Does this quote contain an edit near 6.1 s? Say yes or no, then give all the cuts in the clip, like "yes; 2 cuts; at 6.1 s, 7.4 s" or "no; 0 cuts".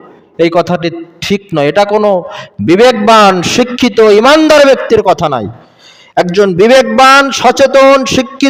no; 0 cuts